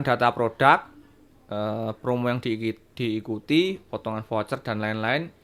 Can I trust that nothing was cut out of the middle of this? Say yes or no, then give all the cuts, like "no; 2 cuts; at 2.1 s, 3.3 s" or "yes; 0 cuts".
yes; 0 cuts